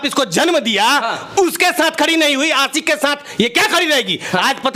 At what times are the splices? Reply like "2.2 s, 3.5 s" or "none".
none